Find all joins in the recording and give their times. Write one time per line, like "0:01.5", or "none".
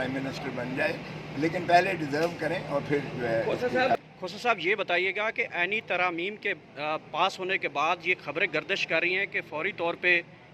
0:03.9